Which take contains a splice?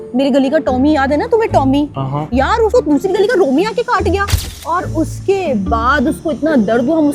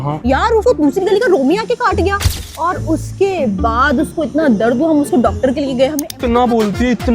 second; 1 cut; at 6.1 s

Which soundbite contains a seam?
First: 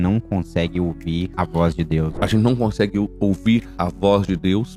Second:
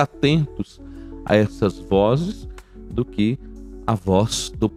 first; 3 cuts; at 1.3 s, 2.1 s, 3.8 s

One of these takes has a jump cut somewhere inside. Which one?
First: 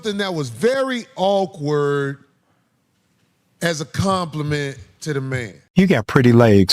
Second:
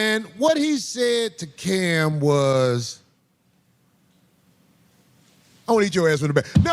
first; 1 cut; at 5.6 s

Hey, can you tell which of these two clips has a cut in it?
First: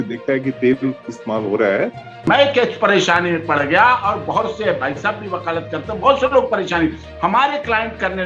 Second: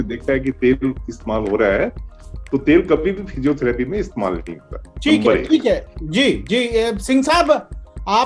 first; 1 cut; at 2.3 s

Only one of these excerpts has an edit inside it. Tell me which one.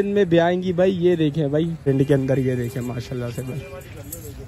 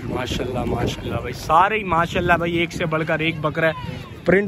first; 1 cut; at 1.8 s

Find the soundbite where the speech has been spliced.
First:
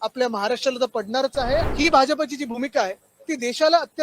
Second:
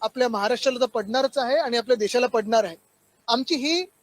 first; 1 cut; at 1.7 s

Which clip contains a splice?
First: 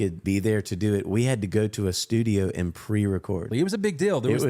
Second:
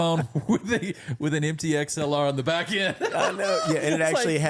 first; 1 cut; at 3.5 s

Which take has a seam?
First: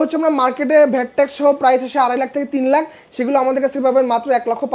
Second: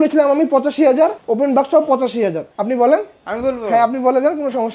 second; 2 cuts; at 1.2 s, 2.5 s

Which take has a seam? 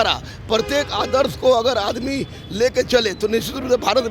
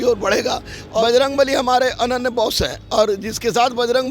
second; 1 cut; at 1.0 s

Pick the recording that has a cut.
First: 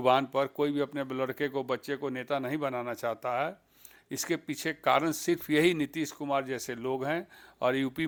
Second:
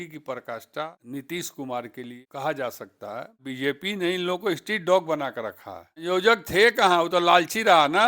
second; 4 cuts; at 1.0 s, 2.1 s, 3.4 s, 6.0 s

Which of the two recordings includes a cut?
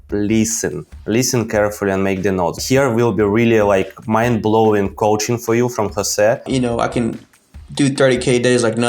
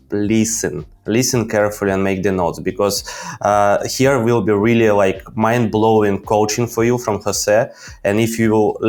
first; 2 cuts; at 2.6 s, 6.5 s

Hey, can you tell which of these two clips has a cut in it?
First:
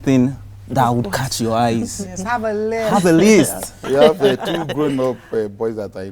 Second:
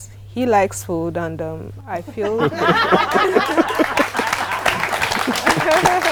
first; 1 cut; at 3.8 s

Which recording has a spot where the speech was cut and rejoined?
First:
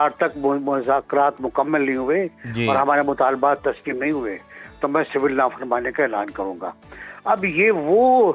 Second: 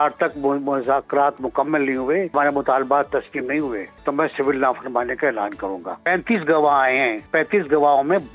second; 4 cuts; at 2.3 s, 3.9 s, 6.0 s, 7.3 s

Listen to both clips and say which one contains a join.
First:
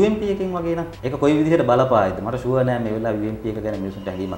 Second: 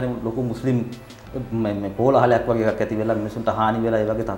first; 1 cut; at 0.9 s

